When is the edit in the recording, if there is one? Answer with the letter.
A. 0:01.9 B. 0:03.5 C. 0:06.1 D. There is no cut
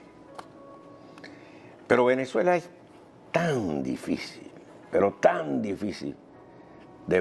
D